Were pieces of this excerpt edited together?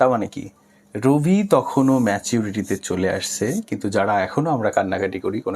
no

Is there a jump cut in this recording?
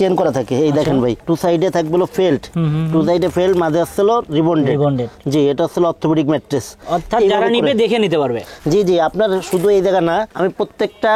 no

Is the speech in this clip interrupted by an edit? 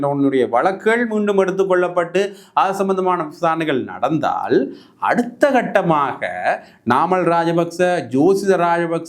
no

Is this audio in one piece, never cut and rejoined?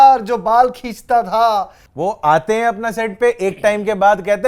no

